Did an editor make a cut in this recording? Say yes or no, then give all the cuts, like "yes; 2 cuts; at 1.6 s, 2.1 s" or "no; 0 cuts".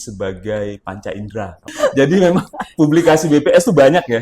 yes; 1 cut; at 1.7 s